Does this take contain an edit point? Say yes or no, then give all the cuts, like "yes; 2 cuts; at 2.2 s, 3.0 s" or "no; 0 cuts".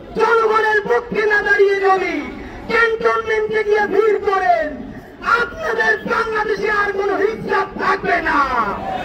no; 0 cuts